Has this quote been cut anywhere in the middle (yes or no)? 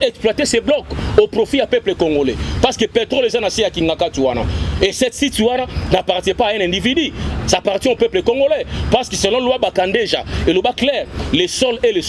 no